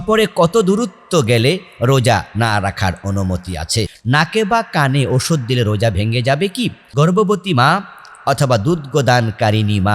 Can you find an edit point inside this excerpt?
yes; 2 cuts; at 4.0 s, 6.8 s

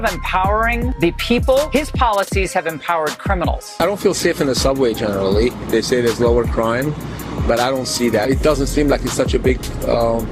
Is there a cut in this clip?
yes; 3 cuts; at 0.9 s, 1.7 s, 3.8 s

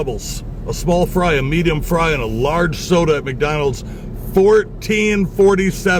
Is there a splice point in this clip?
no; 0 cuts

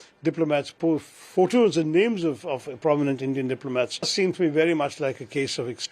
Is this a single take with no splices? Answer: no; 1 cut; at 4.1 s

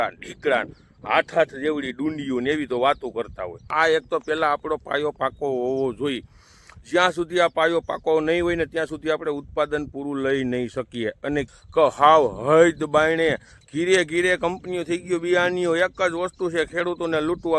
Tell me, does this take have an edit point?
yes; 2 cuts; at 3.7 s, 11.5 s

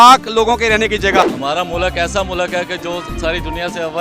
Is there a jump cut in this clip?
yes; 1 cut; at 1.2 s

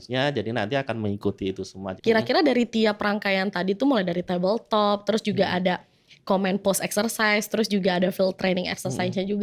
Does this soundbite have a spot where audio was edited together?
yes; 1 cut; at 1.9 s

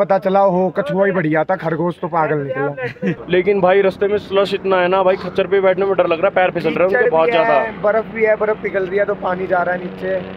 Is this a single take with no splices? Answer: yes; 0 cuts

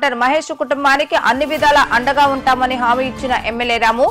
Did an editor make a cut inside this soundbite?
no; 0 cuts

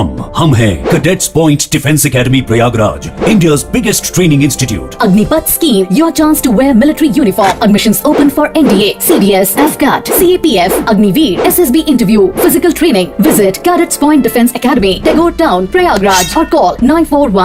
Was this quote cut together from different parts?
no; 0 cuts

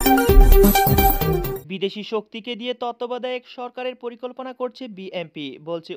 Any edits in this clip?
no; 0 cuts

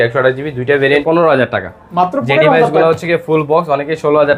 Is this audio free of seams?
no; 1 cut; at 1.0 s

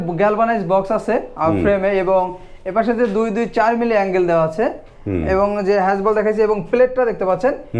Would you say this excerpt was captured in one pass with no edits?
yes; 0 cuts

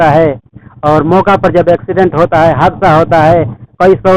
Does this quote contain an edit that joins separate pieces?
no; 0 cuts

